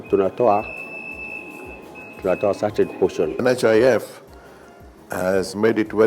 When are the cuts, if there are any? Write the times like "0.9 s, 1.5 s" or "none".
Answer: 3.3 s